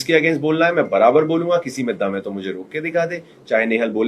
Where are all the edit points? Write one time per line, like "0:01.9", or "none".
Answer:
none